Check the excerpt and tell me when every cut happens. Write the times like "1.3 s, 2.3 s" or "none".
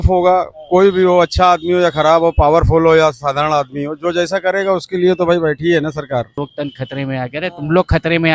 6.4 s